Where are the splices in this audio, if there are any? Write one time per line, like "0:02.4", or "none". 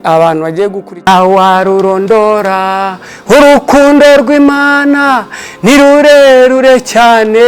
0:01.1